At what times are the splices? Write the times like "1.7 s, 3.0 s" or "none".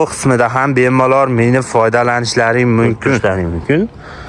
3.2 s

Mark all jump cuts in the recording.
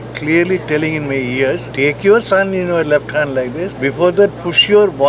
1.7 s, 3.7 s

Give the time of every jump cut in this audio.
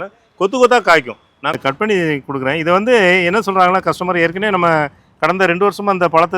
1.5 s

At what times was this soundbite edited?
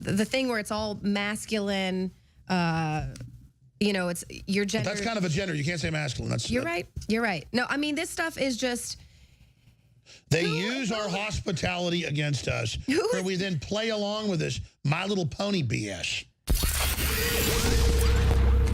16.3 s

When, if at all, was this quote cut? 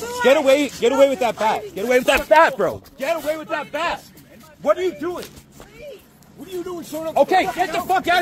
none

